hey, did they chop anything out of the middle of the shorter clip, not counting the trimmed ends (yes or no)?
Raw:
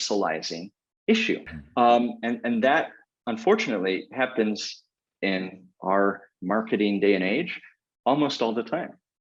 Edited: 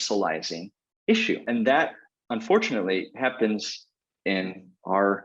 yes